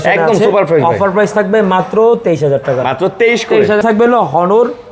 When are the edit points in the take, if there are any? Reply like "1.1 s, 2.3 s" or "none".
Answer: 3.8 s